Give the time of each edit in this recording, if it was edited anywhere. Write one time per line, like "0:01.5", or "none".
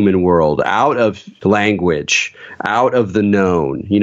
none